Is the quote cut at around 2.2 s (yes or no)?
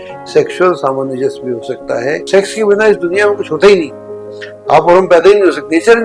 yes